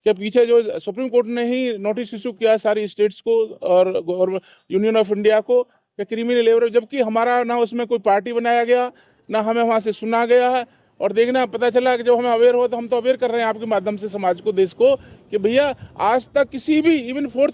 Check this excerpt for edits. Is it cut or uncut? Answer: uncut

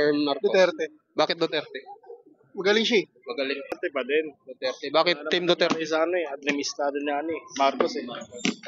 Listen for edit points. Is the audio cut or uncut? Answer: cut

